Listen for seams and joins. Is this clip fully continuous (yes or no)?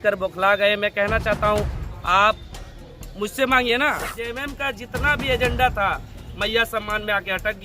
no